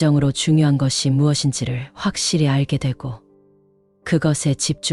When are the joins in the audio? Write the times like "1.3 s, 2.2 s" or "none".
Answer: none